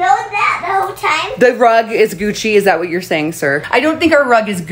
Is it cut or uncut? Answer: uncut